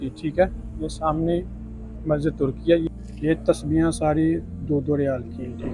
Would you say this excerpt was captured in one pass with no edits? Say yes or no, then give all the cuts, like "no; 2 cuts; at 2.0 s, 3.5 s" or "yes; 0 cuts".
no; 1 cut; at 2.9 s